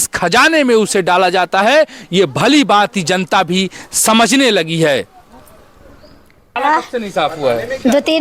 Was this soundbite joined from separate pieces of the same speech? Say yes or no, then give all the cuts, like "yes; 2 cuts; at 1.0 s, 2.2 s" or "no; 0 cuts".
yes; 1 cut; at 6.6 s